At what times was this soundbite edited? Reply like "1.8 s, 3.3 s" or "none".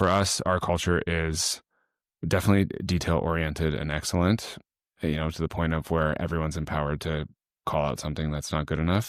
none